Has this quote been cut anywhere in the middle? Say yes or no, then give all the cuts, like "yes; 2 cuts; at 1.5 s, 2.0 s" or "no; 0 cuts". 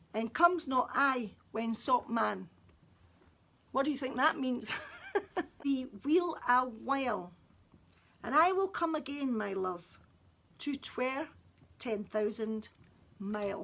yes; 1 cut; at 5.6 s